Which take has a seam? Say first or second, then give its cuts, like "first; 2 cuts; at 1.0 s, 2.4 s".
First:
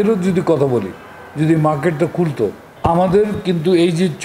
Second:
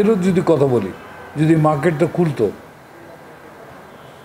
first; 1 cut; at 2.6 s